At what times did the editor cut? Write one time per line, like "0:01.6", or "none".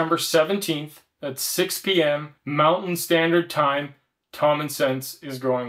0:02.4

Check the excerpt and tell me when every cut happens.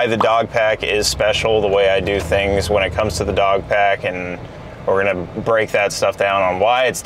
none

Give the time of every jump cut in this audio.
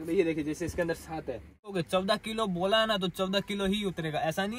0:01.7

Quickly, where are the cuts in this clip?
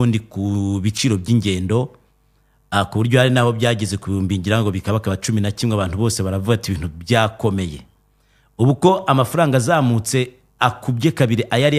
none

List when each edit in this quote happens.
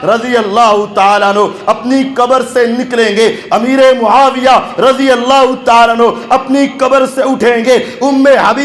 none

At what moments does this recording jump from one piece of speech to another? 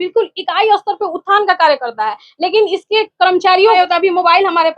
0:03.8

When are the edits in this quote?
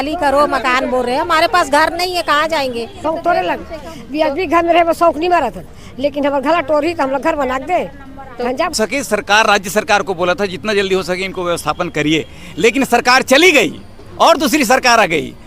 0:03.0
0:08.7

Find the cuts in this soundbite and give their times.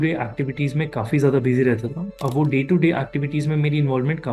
none

